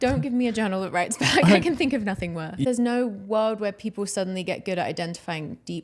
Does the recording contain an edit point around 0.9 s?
no; 1 cut; at 2.5 s

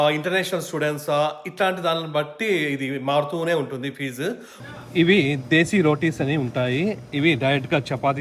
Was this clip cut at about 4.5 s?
yes; 1 cut; at 4.5 s

